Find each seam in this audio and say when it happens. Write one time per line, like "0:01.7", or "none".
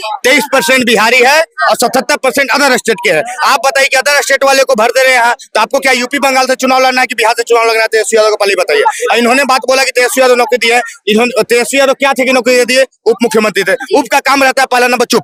none